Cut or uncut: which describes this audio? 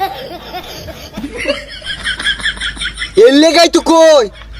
cut